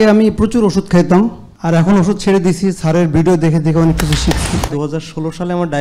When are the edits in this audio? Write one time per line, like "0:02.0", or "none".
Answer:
0:01.5
0:04.7